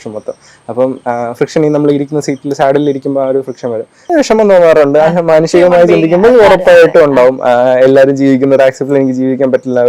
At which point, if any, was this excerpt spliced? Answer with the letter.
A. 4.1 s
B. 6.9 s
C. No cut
A